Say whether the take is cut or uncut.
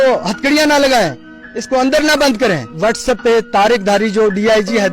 cut